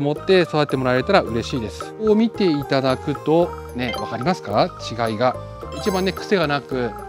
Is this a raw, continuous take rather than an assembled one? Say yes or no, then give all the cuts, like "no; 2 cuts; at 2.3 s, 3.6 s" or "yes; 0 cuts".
no; 2 cuts; at 2.0 s, 5.8 s